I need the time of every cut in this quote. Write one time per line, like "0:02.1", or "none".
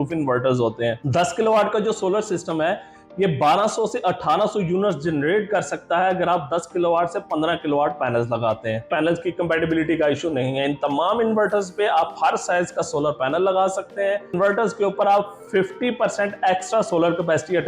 0:01.0
0:08.9
0:14.3